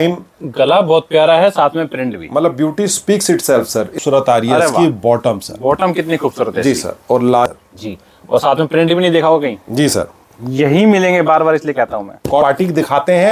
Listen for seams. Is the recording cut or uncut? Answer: cut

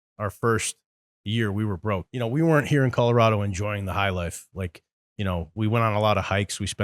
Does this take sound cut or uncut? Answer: cut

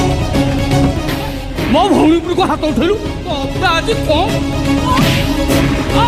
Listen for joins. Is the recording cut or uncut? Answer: uncut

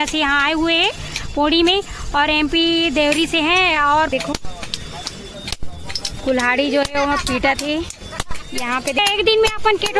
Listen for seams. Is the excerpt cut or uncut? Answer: cut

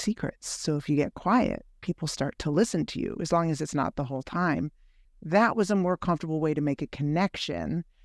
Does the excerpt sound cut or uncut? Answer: cut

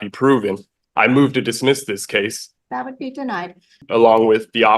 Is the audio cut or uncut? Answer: cut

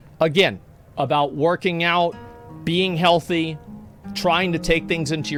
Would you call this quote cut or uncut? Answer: uncut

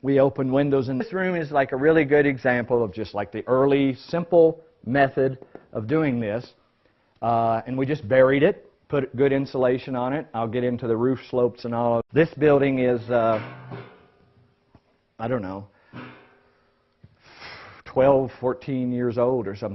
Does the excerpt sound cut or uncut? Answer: uncut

